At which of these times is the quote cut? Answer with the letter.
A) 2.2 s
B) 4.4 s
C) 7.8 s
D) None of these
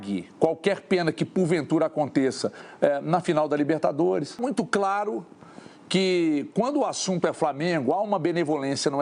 B